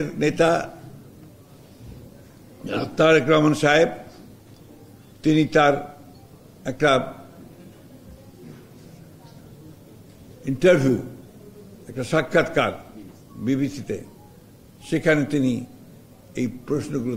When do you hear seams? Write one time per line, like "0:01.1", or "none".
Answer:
none